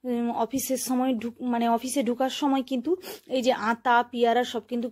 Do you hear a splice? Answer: no; 0 cuts

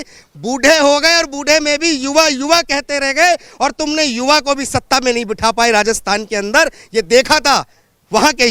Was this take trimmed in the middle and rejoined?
no; 0 cuts

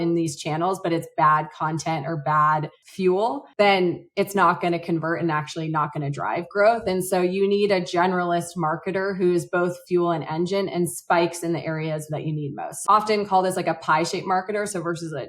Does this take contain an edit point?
yes; 1 cut; at 3.4 s

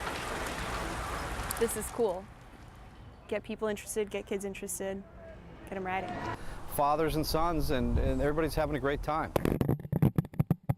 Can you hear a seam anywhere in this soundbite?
yes; 1 cut; at 6.3 s

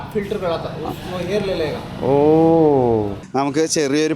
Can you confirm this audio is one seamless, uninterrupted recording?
no; 1 cut; at 3.2 s

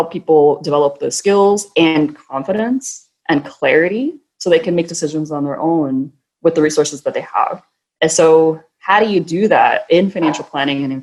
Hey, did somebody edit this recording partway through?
no; 0 cuts

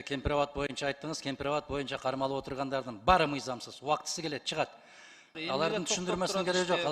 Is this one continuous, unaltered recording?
no; 1 cut; at 5.4 s

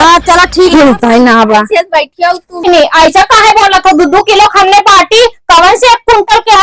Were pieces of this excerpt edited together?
yes; 1 cut; at 2.7 s

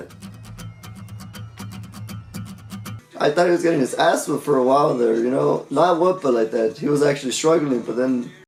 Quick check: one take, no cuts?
yes; 0 cuts

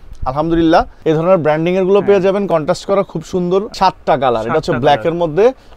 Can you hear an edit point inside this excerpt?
yes; 2 cuts; at 0.9 s, 3.7 s

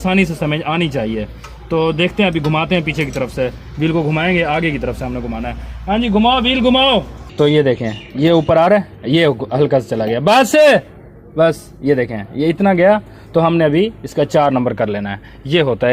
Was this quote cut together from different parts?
no; 0 cuts

